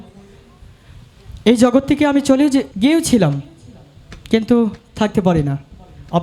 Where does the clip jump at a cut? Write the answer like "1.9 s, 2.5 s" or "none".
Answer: 2.7 s